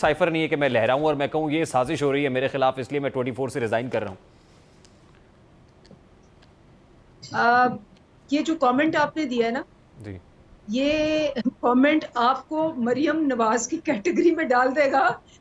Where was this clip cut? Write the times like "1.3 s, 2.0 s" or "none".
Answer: none